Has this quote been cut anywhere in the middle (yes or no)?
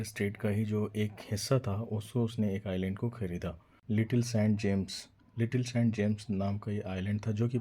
yes